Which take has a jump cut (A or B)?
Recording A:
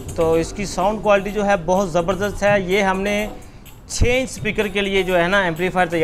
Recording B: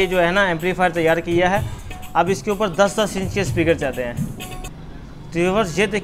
B